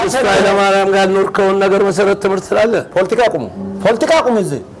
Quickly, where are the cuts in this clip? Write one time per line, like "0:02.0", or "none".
none